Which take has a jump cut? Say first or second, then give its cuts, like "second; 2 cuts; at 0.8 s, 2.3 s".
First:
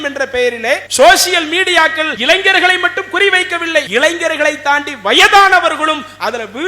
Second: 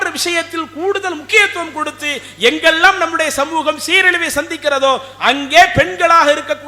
first; 3 cuts; at 0.9 s, 2.1 s, 3.9 s